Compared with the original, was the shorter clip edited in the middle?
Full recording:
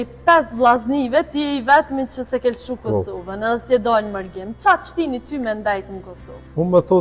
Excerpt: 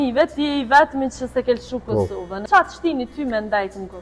yes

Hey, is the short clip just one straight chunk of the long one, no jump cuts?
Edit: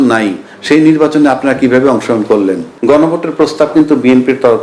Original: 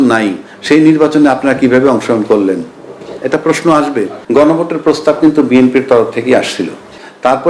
no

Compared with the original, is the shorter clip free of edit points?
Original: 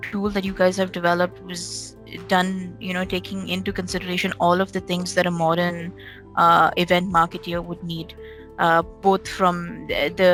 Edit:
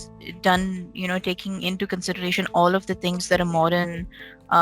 yes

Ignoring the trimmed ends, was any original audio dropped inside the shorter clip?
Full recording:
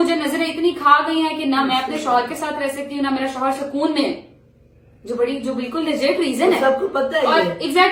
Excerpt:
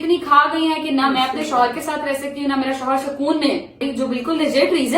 yes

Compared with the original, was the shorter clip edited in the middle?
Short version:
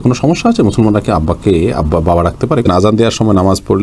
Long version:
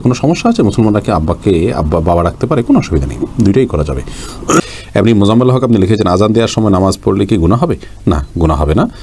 yes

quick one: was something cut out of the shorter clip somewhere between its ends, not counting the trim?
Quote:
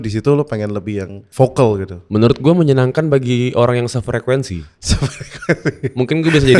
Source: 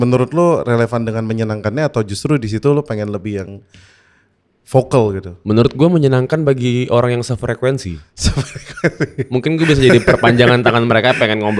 yes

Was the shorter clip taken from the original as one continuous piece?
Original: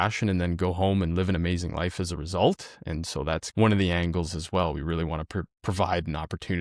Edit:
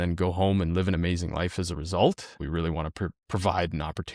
no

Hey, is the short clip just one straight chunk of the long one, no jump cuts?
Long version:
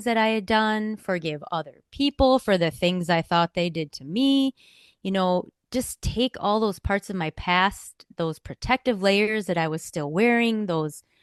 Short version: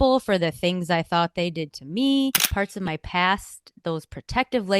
no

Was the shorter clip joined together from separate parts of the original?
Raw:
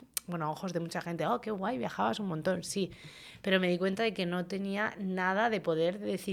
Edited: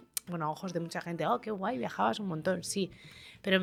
no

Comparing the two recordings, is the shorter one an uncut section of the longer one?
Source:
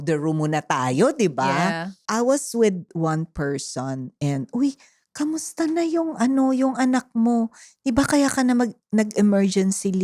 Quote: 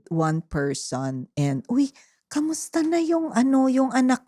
yes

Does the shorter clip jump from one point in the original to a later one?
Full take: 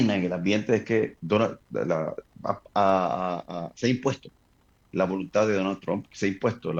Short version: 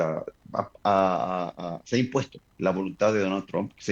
yes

